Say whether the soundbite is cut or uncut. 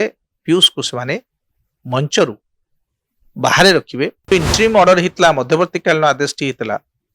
cut